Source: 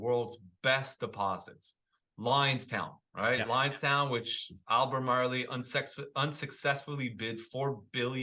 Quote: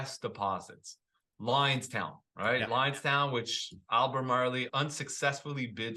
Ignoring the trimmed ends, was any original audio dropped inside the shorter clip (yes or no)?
yes